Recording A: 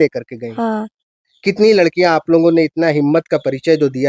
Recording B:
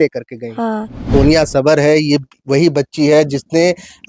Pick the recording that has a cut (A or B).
B